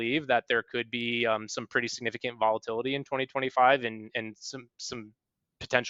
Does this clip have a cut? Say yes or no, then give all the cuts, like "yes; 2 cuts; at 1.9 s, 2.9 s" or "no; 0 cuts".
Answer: no; 0 cuts